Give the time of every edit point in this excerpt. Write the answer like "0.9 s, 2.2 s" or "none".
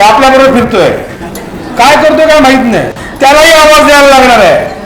3.0 s